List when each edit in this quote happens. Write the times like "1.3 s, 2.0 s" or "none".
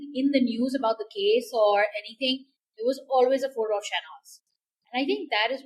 none